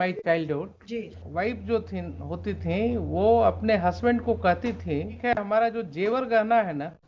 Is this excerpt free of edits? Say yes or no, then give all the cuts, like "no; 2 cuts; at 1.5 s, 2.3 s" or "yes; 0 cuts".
no; 2 cuts; at 1.2 s, 5.1 s